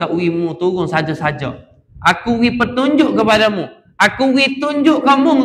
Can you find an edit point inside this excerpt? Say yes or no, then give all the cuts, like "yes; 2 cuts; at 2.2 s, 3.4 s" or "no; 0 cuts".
no; 0 cuts